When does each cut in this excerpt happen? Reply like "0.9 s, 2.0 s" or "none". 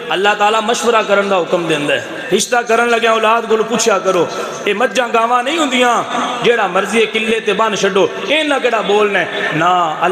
2.1 s